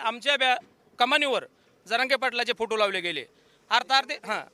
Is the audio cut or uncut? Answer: uncut